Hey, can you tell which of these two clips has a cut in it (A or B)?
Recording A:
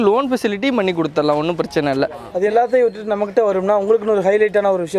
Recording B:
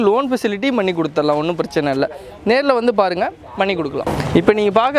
A